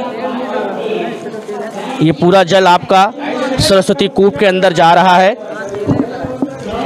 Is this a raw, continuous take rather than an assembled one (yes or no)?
yes